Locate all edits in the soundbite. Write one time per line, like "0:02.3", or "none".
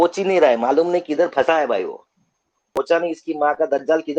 0:02.8